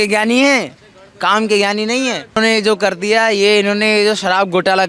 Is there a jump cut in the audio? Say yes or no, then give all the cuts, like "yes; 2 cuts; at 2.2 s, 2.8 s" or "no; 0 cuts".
yes; 1 cut; at 2.4 s